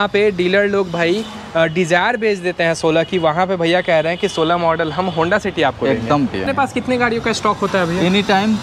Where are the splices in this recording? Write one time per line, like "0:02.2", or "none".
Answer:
0:06.4